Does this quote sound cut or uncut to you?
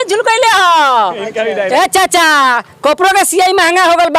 cut